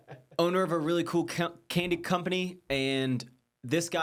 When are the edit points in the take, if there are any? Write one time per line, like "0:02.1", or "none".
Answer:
none